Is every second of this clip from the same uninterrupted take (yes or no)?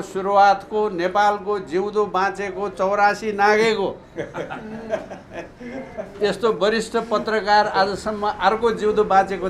yes